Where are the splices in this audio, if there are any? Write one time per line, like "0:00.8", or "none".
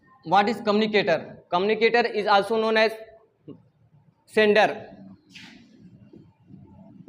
none